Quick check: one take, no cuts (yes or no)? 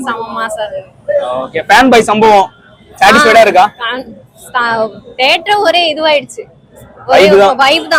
yes